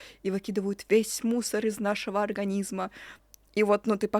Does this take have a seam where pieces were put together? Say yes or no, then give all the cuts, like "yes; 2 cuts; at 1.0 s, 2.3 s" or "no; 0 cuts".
yes; 1 cut; at 3.0 s